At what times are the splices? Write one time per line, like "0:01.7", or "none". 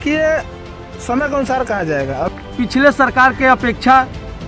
0:02.3